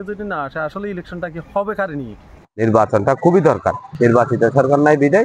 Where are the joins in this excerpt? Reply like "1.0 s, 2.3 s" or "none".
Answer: 2.4 s, 3.9 s